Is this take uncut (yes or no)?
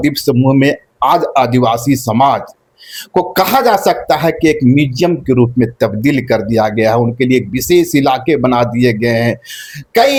yes